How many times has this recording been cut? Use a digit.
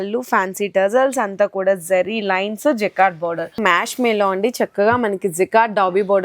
1